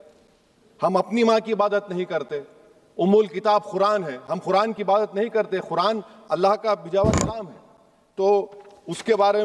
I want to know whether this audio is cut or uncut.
uncut